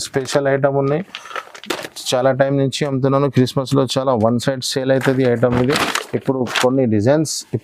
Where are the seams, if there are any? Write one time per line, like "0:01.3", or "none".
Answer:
none